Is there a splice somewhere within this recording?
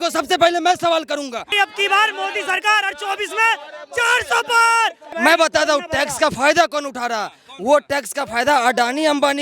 yes; 2 cuts; at 1.5 s, 5.1 s

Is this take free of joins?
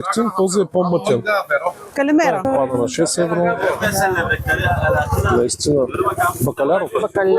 no; 1 cut; at 2.5 s

